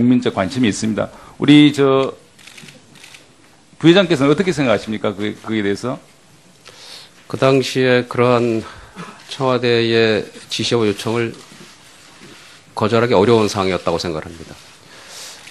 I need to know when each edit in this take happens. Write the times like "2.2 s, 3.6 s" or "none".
none